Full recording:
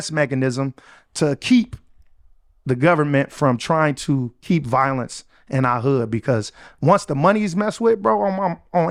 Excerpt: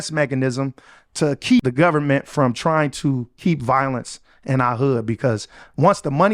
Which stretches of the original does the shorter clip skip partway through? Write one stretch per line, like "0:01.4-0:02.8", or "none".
0:01.6-0:02.7